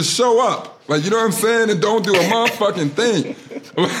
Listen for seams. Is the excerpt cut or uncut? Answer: uncut